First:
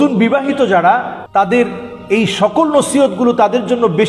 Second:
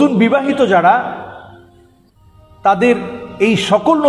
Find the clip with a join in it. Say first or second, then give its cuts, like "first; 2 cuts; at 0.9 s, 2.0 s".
first; 1 cut; at 1.2 s